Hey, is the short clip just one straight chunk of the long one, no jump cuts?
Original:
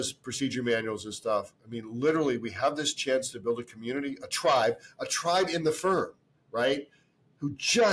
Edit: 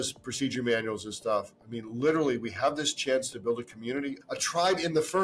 no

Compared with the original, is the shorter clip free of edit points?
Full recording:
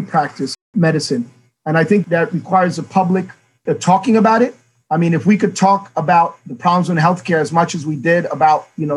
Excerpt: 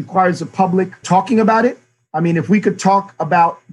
no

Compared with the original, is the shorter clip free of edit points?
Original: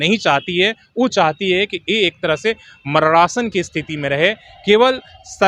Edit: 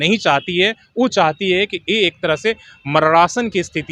yes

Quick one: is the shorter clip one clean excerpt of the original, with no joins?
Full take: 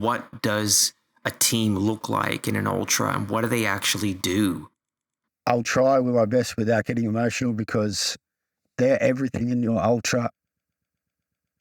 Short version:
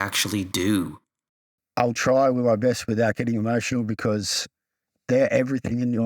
yes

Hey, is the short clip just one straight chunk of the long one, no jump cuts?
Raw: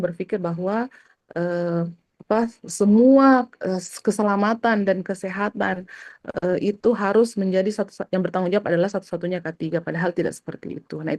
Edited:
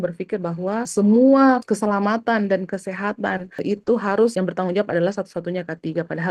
no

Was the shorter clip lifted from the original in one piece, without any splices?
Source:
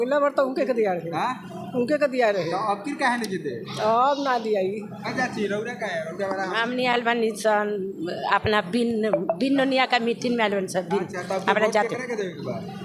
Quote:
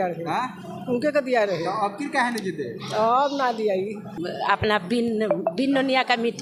no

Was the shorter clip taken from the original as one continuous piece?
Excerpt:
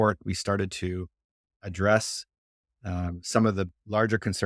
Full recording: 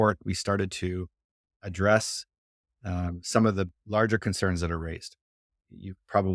yes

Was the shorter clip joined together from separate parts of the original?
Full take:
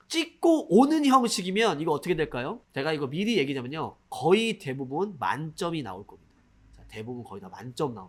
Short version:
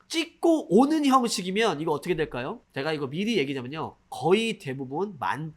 no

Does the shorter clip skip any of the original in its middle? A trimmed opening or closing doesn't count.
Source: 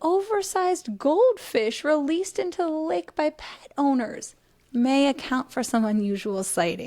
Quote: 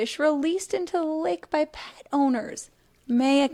no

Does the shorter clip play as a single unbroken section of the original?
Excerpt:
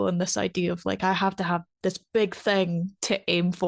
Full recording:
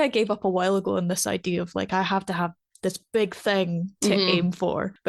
no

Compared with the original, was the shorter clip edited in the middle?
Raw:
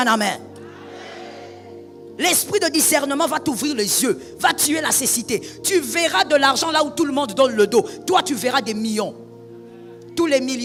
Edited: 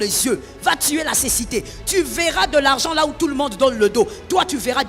no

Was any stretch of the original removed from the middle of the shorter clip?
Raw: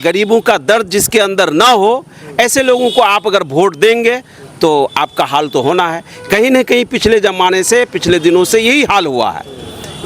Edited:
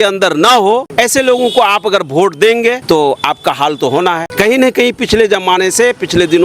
yes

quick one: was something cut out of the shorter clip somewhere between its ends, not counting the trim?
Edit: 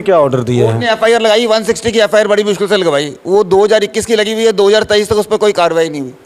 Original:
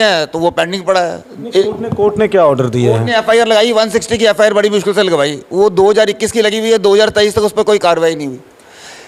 no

